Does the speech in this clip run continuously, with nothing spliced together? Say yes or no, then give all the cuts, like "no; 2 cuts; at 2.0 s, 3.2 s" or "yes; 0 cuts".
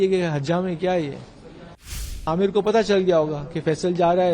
no; 1 cut; at 2.1 s